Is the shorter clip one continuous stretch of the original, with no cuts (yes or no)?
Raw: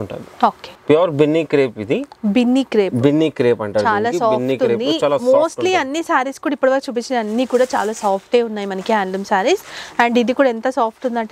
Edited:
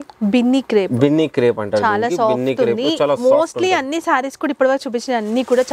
yes